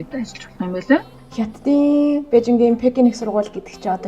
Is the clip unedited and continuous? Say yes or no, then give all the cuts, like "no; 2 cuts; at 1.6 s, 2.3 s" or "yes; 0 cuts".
no; 1 cut; at 1.1 s